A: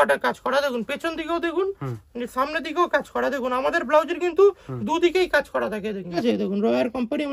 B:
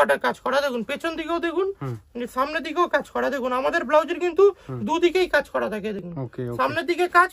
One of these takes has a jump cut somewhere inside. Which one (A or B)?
A